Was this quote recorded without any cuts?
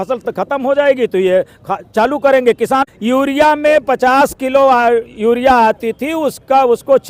no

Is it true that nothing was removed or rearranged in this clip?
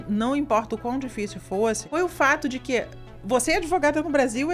no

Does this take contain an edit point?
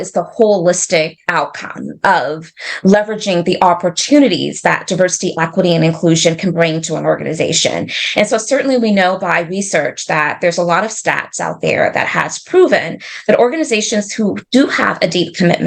no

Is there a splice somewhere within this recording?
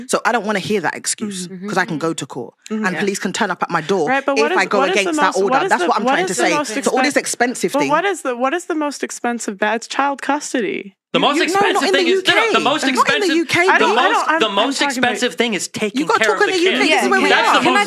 no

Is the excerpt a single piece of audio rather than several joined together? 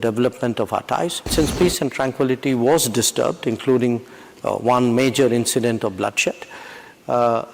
no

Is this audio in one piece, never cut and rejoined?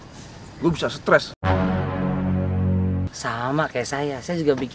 no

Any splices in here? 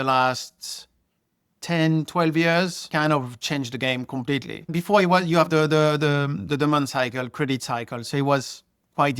yes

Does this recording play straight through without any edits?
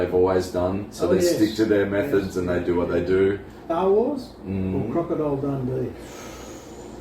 no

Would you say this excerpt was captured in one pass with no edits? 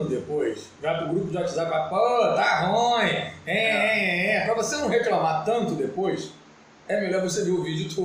yes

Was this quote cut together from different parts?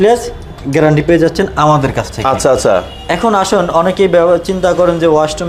no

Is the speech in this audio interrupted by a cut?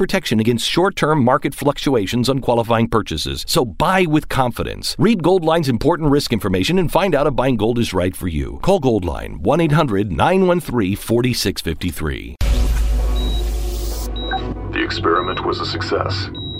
yes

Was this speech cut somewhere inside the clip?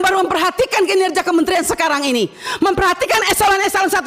no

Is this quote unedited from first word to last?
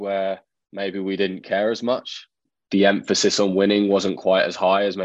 no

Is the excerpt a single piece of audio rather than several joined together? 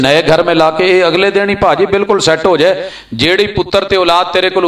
yes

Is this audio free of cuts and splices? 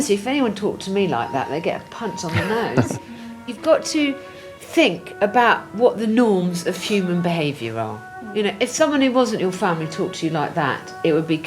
yes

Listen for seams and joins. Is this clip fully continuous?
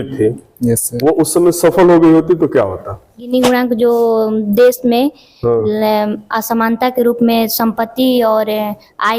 no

